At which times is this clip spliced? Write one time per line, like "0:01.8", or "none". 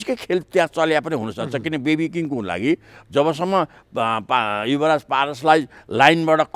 none

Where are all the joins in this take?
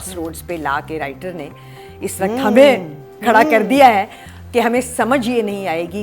none

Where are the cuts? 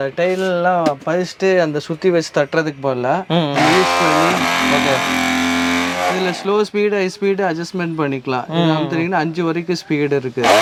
none

